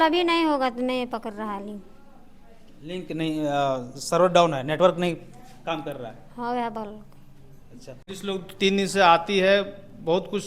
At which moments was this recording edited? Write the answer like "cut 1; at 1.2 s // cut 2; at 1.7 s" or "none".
cut 1; at 8.1 s